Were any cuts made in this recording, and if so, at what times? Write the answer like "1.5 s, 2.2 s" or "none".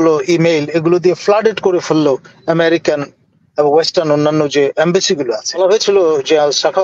5.6 s